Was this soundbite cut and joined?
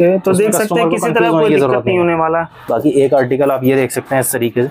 yes; 1 cut; at 2.6 s

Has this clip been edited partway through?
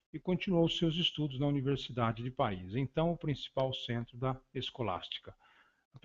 yes; 1 cut; at 1.9 s

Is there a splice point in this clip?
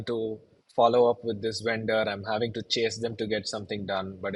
no; 0 cuts

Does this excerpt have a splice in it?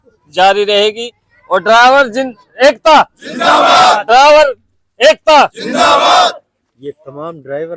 no; 0 cuts

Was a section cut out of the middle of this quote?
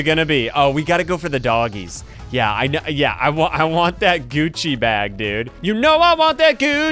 no; 0 cuts

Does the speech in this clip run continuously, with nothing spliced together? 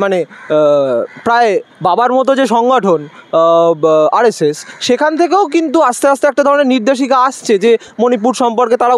yes; 0 cuts

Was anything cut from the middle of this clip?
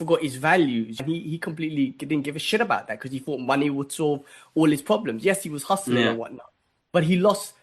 yes; 1 cut; at 1.0 s

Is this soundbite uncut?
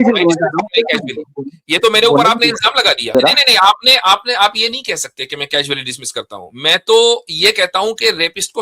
no; 1 cut; at 3.1 s

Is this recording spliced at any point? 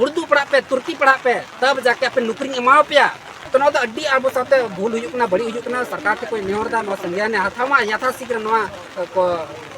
yes; 1 cut; at 3.3 s

